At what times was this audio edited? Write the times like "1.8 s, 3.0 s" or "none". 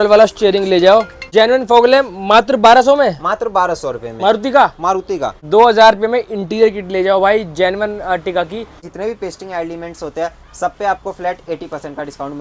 1.2 s, 5.4 s, 8.8 s